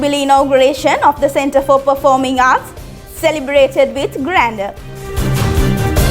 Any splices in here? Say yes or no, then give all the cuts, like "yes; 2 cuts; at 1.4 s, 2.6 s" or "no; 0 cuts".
yes; 1 cut; at 5.1 s